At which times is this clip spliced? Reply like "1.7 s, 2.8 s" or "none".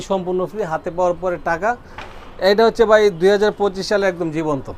none